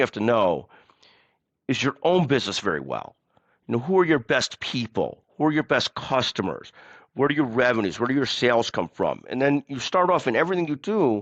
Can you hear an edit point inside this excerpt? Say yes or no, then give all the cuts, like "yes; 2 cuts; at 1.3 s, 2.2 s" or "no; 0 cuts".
no; 0 cuts